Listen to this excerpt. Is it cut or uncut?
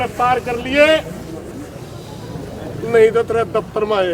uncut